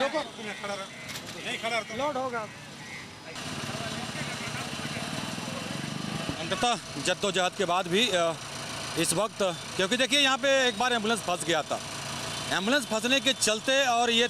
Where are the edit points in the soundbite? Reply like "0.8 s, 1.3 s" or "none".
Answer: none